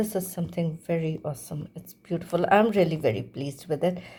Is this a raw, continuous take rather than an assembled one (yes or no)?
yes